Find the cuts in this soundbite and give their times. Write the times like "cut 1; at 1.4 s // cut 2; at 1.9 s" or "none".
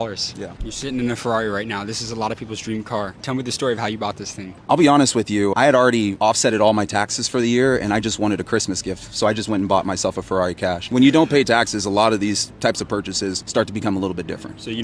cut 1; at 2.6 s // cut 2; at 11.1 s